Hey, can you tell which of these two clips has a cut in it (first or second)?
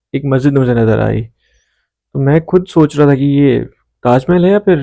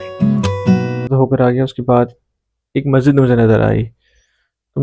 second